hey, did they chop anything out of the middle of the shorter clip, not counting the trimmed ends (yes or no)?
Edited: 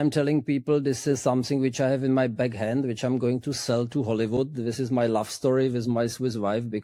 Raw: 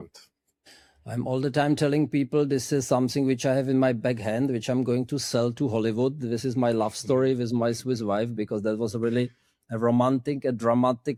no